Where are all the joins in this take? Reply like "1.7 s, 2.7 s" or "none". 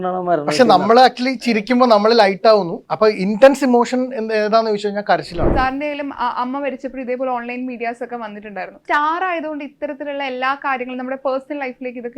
2.8 s, 5.5 s, 8.8 s